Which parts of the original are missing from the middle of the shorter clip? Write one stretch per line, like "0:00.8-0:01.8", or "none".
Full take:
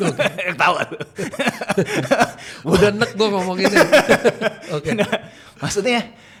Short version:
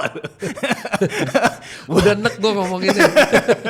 none